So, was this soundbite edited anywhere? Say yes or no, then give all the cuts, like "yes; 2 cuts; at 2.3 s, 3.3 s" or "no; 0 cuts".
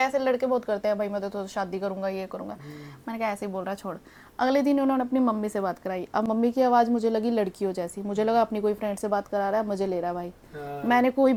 no; 0 cuts